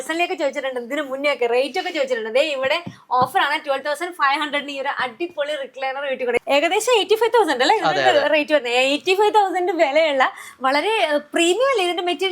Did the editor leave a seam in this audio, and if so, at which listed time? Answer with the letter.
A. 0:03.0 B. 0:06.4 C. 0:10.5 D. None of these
B